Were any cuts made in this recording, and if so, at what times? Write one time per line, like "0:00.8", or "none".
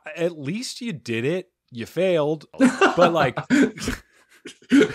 0:02.5